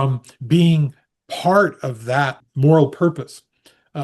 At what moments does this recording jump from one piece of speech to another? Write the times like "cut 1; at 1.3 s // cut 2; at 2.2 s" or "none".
cut 1; at 2.4 s